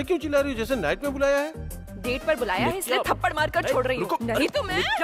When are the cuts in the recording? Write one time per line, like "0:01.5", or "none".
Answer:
none